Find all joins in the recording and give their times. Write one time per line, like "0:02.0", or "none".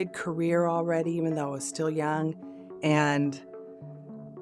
none